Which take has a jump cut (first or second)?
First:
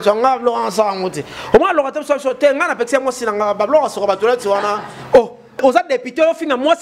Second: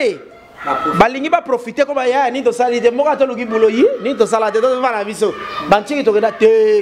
first